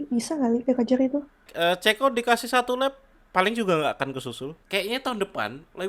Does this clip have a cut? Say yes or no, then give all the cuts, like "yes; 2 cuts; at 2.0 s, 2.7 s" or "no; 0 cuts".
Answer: yes; 2 cuts; at 1.5 s, 4.6 s